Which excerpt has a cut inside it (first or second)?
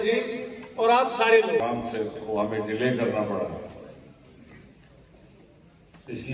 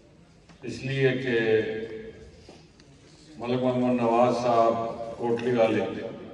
first